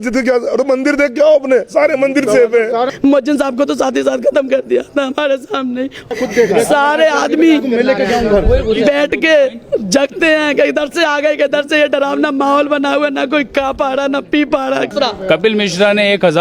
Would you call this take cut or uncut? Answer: cut